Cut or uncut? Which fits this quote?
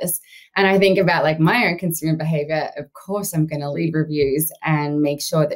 cut